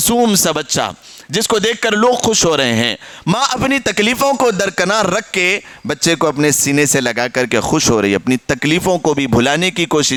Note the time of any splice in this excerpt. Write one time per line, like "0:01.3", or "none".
none